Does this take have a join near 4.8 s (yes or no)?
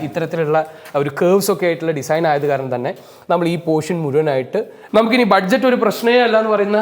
yes